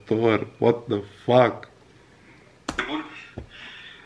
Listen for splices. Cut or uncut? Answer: uncut